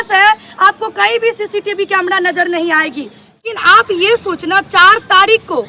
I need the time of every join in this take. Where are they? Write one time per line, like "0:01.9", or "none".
0:03.4